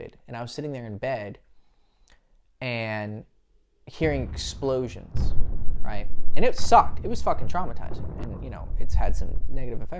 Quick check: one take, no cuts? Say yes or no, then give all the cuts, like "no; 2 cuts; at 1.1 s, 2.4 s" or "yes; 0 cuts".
yes; 0 cuts